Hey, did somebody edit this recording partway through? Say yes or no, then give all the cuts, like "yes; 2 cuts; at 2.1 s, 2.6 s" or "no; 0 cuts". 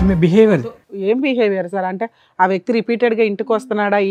no; 0 cuts